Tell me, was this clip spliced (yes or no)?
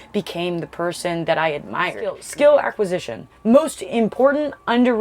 yes